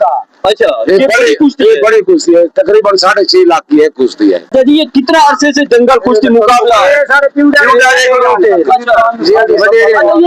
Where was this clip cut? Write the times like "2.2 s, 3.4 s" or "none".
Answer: 4.5 s